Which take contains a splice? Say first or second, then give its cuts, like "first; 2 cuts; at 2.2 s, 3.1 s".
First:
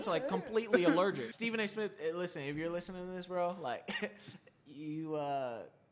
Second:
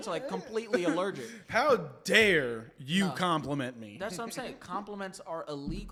first; 1 cut; at 1.3 s